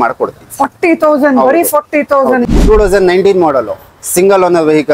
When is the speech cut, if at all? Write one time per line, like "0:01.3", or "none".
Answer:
0:02.4